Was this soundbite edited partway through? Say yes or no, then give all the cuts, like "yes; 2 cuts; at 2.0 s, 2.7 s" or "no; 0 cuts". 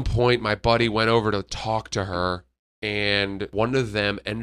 yes; 1 cut; at 3.5 s